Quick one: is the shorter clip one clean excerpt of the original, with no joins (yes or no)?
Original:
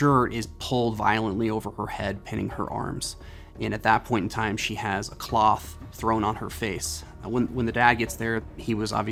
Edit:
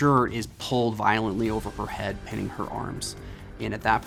yes